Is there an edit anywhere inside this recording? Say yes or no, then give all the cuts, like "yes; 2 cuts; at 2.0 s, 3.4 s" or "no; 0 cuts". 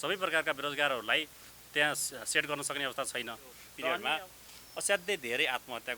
yes; 1 cut; at 4.0 s